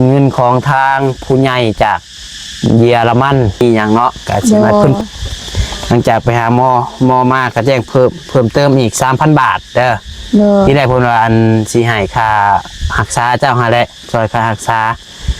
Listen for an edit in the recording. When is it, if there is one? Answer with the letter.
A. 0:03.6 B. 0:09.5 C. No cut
A